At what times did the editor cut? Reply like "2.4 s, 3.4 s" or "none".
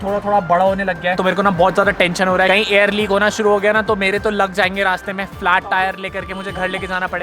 none